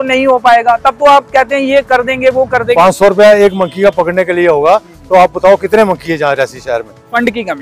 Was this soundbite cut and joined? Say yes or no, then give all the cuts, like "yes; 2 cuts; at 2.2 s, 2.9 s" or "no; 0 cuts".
yes; 1 cut; at 2.8 s